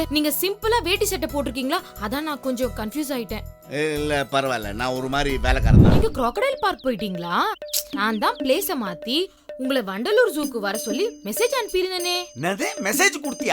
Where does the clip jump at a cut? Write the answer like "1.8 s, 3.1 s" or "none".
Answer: 5.9 s